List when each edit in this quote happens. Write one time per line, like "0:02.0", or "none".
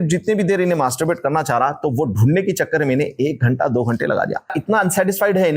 0:04.6